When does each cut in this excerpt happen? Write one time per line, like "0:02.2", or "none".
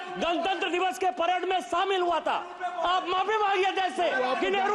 none